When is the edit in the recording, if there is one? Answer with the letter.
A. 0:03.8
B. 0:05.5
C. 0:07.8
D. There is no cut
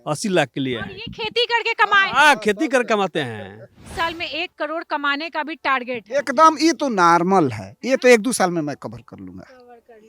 A